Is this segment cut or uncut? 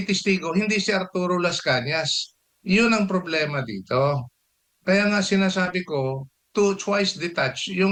uncut